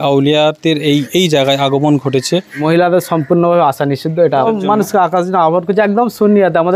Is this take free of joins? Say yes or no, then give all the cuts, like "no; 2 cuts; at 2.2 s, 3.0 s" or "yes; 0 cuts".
no; 2 cuts; at 2.6 s, 4.5 s